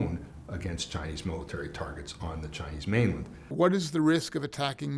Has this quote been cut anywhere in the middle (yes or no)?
yes